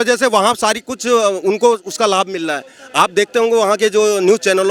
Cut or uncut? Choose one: uncut